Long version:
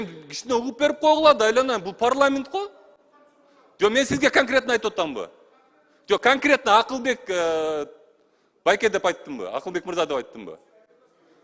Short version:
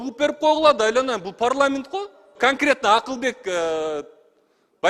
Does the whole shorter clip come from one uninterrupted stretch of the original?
no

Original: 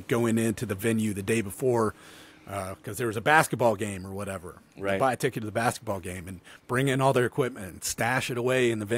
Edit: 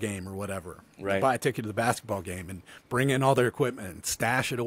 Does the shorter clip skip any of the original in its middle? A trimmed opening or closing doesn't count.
no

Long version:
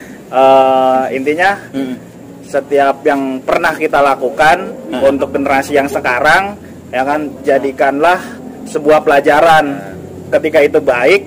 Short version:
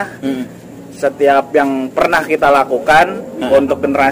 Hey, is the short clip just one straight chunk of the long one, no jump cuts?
yes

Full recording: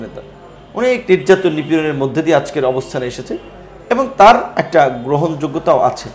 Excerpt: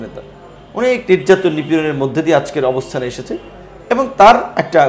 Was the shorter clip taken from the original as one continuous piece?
yes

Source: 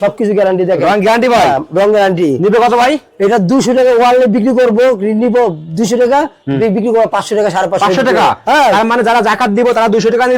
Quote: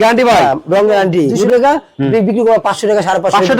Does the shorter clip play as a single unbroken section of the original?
no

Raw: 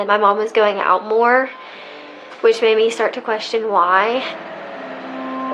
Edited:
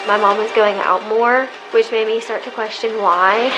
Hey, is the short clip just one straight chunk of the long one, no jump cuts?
no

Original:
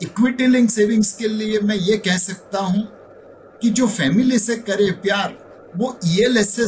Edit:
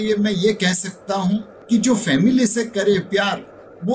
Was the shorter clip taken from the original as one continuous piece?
no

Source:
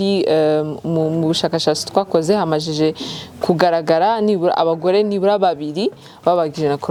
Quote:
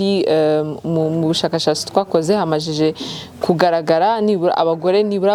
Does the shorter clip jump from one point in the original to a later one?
no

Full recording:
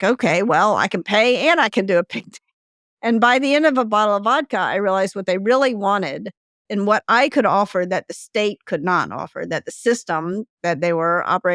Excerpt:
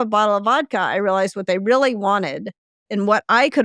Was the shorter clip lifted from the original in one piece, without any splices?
yes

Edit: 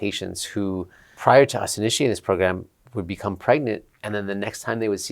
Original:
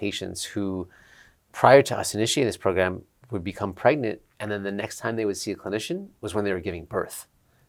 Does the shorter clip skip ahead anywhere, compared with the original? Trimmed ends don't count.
yes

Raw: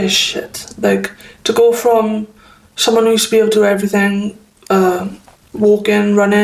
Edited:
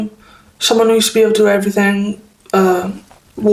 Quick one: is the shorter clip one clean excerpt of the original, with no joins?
yes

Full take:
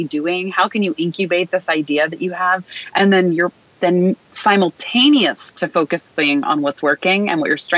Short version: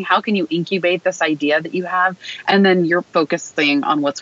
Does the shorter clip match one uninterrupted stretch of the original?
no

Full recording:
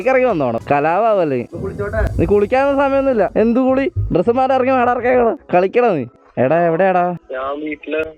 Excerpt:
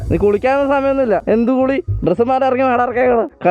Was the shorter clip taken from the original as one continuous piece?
yes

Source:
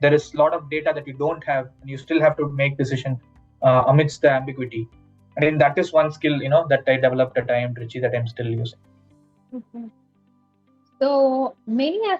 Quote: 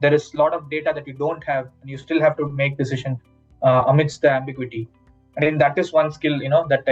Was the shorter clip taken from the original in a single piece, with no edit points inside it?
yes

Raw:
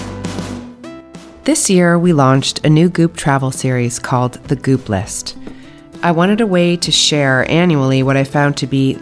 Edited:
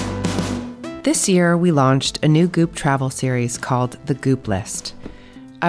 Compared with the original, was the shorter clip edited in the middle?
yes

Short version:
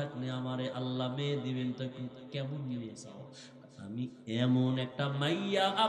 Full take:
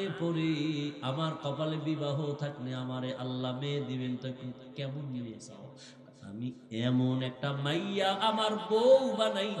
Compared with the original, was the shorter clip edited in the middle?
no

